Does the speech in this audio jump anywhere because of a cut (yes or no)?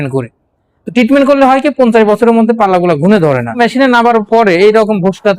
yes